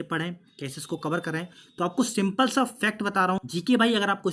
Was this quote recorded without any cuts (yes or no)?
no